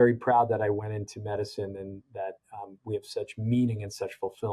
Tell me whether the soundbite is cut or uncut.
uncut